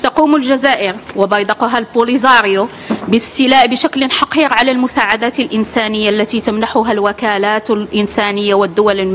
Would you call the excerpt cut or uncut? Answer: uncut